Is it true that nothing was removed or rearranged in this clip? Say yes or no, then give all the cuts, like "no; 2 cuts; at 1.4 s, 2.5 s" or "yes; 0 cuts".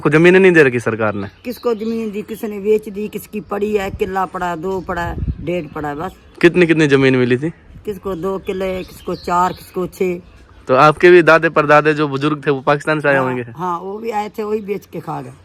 yes; 0 cuts